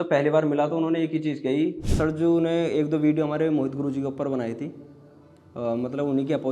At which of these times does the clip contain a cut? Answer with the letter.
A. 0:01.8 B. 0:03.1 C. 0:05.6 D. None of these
A